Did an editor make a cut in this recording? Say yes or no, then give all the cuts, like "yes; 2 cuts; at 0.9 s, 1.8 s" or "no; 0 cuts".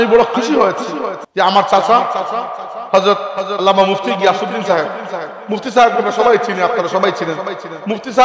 yes; 1 cut; at 1.2 s